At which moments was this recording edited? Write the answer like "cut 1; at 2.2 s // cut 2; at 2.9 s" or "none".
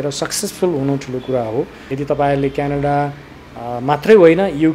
cut 1; at 1.9 s